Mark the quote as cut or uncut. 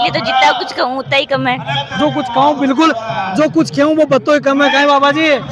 uncut